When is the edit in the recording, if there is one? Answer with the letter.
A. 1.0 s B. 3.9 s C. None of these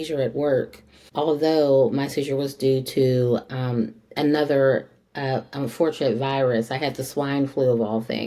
A